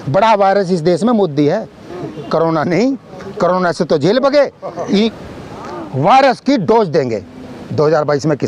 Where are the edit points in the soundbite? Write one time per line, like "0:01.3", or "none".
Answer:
0:05.1